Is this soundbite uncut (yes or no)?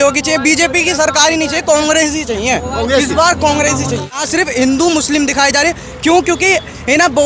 no